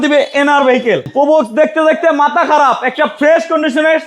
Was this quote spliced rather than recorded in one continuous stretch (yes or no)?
yes